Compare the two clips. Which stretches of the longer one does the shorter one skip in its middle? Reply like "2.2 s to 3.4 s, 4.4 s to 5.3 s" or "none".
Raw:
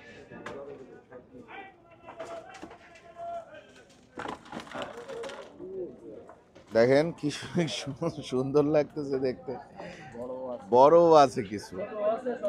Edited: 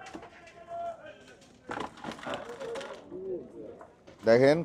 none